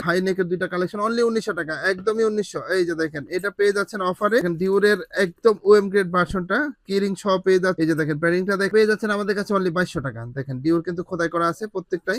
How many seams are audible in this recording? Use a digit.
0